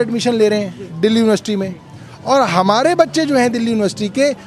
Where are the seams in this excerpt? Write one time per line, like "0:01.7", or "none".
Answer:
none